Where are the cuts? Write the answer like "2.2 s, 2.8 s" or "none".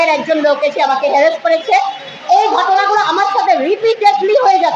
none

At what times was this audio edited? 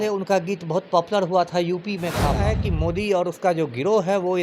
2.5 s

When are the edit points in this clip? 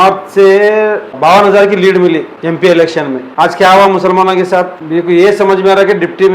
1.1 s, 2.3 s, 3.3 s, 4.8 s

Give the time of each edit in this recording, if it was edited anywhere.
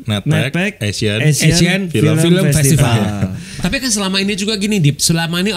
3.4 s

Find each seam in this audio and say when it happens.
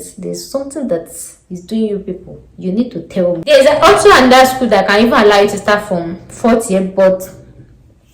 3.4 s

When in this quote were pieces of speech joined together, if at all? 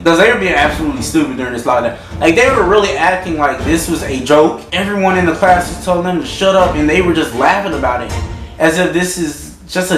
4.6 s

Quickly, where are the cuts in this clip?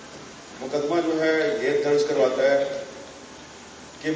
none

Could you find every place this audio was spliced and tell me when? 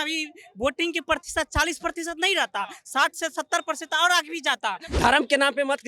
4.9 s

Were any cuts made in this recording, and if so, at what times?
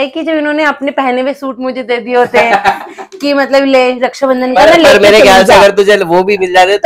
none

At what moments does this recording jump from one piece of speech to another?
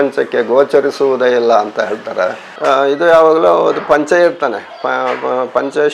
2.6 s

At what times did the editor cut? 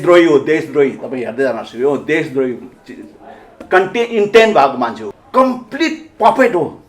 5.1 s

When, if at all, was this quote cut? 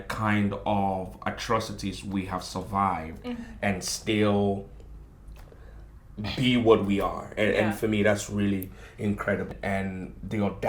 9.5 s

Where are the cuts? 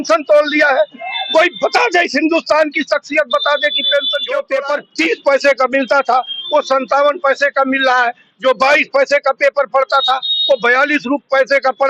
4.5 s

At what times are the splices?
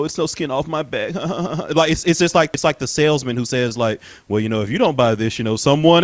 2.5 s

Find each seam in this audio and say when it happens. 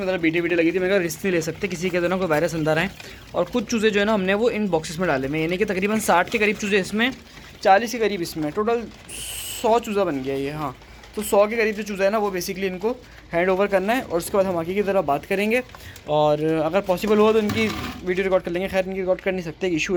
none

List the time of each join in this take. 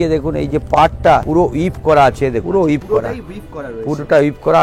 1.3 s, 2.4 s

